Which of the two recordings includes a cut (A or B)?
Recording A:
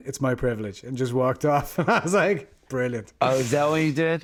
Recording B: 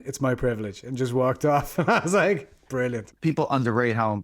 B